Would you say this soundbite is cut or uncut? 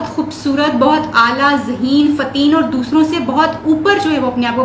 uncut